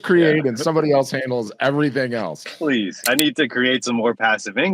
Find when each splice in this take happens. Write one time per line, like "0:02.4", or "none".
0:03.1